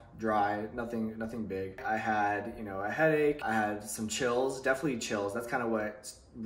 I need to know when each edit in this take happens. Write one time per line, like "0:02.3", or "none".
0:01.8
0:03.5